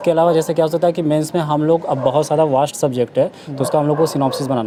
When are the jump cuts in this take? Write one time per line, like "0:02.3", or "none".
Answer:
none